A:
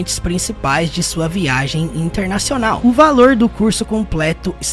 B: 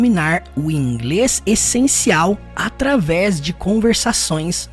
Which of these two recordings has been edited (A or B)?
A